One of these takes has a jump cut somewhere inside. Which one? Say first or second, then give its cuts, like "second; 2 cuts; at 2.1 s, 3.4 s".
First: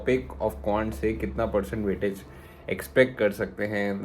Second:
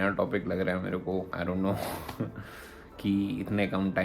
second; 1 cut; at 1.3 s